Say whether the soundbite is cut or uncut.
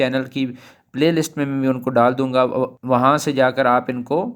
cut